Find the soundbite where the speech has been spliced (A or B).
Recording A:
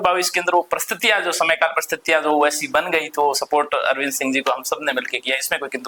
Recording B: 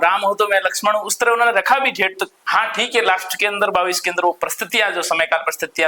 B